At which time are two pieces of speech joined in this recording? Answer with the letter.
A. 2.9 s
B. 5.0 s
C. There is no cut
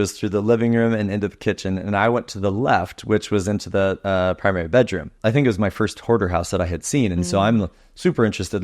B